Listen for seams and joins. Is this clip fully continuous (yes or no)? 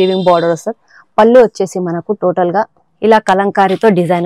no